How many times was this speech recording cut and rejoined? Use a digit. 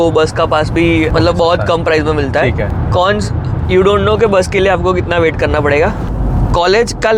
3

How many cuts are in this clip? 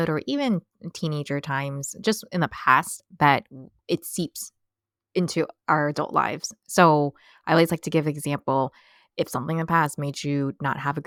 0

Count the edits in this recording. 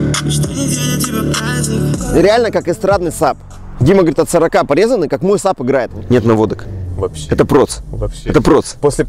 2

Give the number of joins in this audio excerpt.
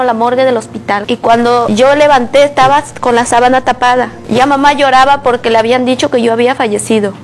1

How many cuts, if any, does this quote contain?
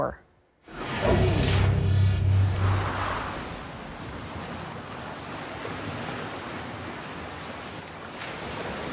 1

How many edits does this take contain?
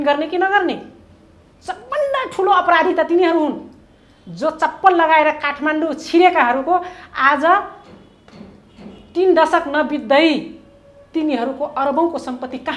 0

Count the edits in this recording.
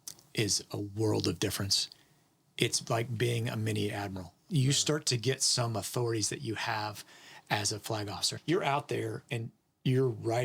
2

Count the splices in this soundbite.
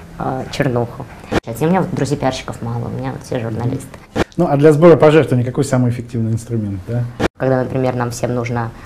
3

